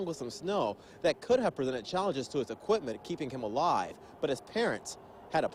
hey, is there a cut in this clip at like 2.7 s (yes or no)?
no